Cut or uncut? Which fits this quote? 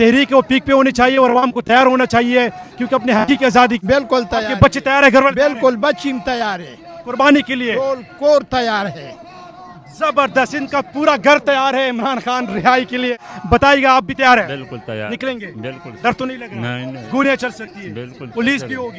cut